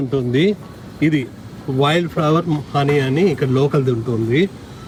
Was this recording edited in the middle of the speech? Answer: no; 0 cuts

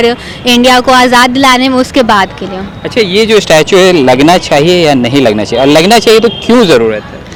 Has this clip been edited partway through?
no; 0 cuts

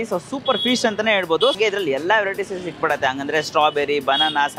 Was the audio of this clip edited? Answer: yes; 1 cut; at 1.6 s

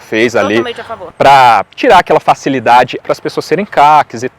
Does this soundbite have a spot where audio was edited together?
yes; 2 cuts; at 1.0 s, 3.0 s

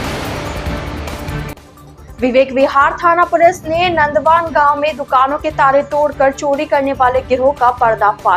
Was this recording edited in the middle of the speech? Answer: yes; 1 cut; at 1.6 s

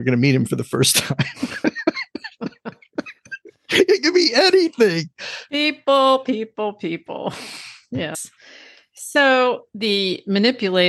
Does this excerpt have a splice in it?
yes; 2 cuts; at 8.1 s, 9.7 s

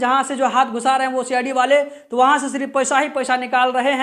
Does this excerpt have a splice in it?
no; 0 cuts

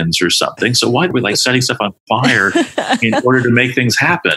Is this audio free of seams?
no; 1 cut; at 1.1 s

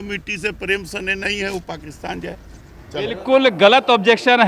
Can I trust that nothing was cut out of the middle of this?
no; 1 cut; at 3.2 s

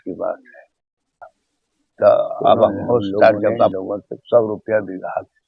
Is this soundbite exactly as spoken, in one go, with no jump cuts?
no; 1 cut; at 3.8 s

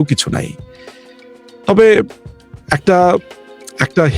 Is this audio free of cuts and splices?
yes; 0 cuts

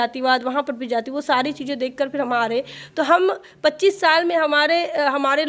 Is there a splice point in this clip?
no; 0 cuts

